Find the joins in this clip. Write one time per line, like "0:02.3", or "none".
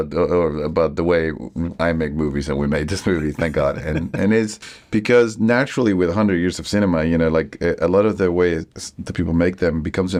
none